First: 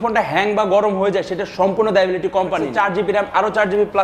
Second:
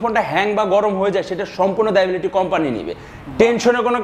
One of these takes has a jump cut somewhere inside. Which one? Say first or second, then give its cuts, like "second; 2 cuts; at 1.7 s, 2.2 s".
first; 1 cut; at 2.7 s